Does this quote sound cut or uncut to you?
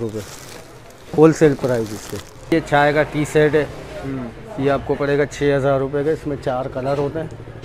cut